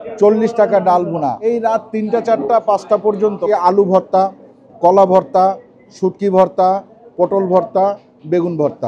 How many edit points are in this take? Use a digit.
2